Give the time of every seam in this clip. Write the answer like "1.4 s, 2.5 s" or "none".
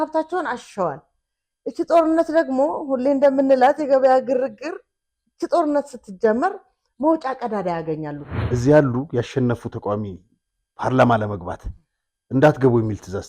8.3 s